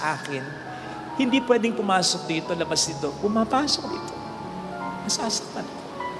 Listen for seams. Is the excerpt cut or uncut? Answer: uncut